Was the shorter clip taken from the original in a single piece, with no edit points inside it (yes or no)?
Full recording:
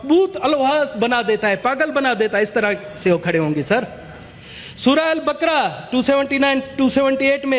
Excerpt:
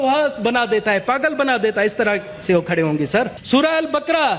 no